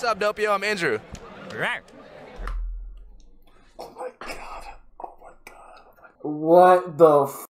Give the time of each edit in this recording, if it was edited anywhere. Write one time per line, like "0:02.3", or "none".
none